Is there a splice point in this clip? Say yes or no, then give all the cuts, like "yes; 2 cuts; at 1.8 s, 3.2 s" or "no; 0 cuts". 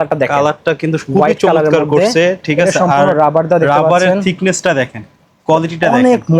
no; 0 cuts